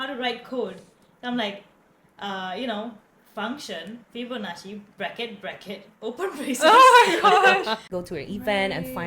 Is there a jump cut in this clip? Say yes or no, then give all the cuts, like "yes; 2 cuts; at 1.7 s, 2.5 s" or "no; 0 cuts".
yes; 1 cut; at 7.8 s